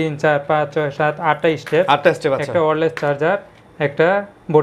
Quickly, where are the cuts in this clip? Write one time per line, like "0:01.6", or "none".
none